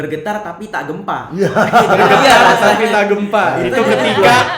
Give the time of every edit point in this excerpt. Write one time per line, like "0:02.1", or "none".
none